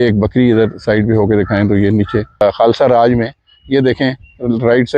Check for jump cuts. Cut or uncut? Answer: cut